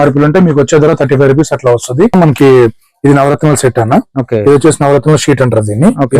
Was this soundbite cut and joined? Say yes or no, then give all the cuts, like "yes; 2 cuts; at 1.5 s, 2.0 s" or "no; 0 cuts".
yes; 1 cut; at 2.1 s